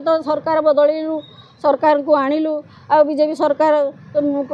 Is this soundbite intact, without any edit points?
yes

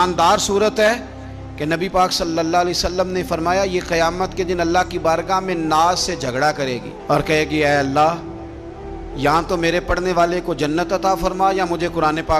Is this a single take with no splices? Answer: yes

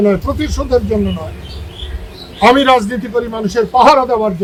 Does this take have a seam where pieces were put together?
no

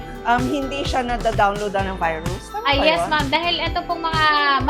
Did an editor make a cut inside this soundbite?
no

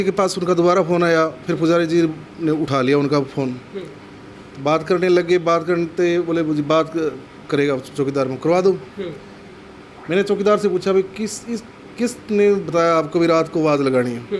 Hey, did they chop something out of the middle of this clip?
no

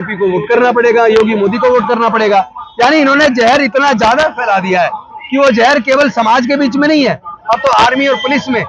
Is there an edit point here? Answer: no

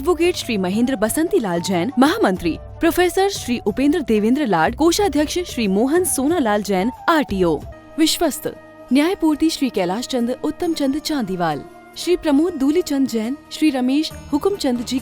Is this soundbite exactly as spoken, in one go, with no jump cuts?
no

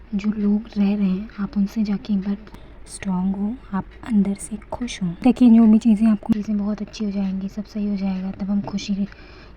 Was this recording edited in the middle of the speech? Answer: yes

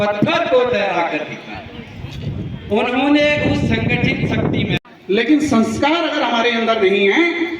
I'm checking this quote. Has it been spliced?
yes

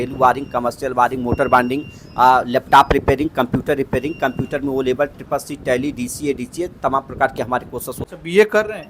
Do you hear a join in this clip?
yes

